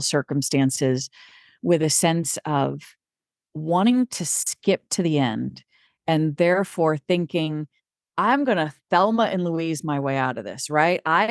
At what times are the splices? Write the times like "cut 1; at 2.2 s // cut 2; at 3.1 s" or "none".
none